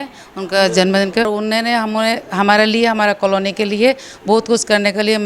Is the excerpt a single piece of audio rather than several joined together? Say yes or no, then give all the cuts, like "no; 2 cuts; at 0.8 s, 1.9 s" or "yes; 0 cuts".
no; 1 cut; at 1.3 s